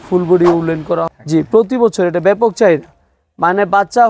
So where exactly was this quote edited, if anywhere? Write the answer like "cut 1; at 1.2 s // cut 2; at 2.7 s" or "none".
cut 1; at 1.0 s